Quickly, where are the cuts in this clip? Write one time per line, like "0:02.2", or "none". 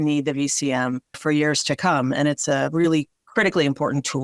0:01.2
0:03.2

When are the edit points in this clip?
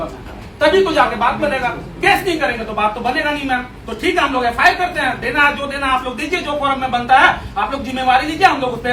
none

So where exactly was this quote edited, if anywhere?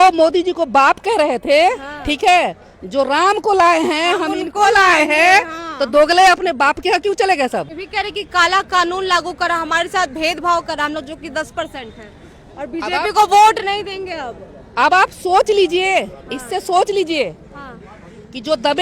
0:07.8

